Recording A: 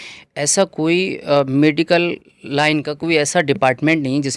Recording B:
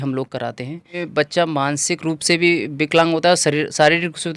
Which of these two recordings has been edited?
B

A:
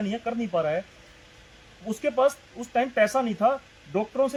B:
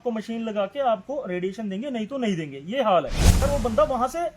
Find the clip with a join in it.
B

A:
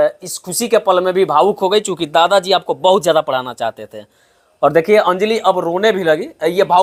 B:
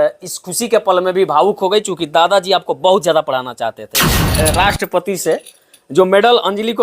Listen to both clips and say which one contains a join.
B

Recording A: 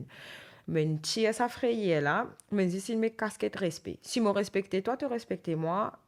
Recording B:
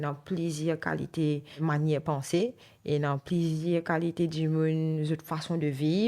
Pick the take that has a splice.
B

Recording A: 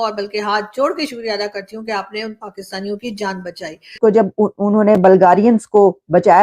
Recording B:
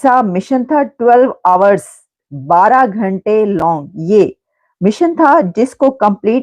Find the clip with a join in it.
A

